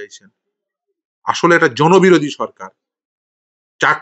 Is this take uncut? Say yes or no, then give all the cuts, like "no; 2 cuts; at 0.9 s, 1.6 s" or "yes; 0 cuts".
yes; 0 cuts